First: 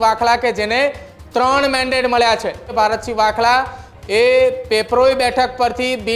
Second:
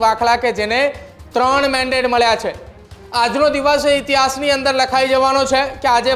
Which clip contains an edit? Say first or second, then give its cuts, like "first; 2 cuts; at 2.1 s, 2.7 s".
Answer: first; 1 cut; at 2.7 s